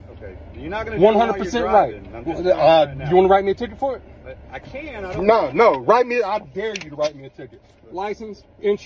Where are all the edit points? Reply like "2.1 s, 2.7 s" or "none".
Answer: none